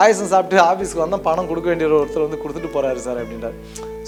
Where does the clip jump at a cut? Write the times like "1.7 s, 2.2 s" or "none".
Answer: none